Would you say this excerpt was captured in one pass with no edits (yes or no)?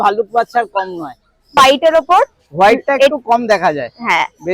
no